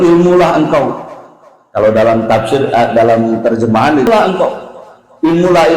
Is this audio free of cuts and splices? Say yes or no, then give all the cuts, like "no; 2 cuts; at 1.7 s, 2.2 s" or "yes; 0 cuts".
no; 1 cut; at 4.1 s